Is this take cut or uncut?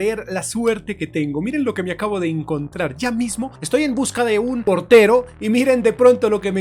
cut